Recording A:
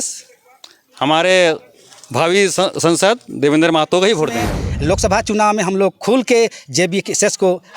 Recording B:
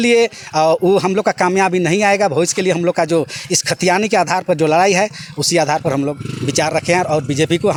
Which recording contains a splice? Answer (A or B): A